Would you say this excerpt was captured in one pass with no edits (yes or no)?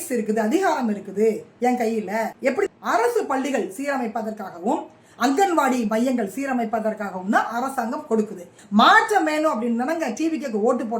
no